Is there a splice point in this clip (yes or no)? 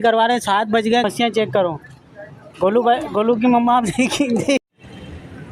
yes